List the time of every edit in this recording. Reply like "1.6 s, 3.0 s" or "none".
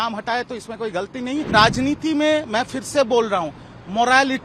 1.5 s